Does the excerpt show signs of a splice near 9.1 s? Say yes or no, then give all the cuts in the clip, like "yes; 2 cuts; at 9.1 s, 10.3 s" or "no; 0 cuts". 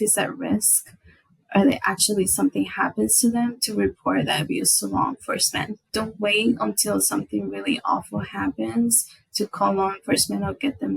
no; 1 cut; at 5.8 s